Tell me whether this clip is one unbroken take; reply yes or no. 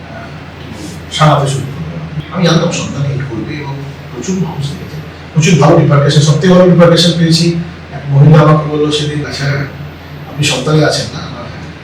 no